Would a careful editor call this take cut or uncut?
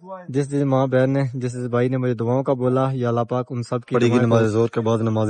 cut